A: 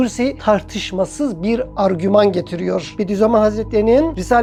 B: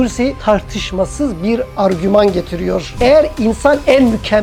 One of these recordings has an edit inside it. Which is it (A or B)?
B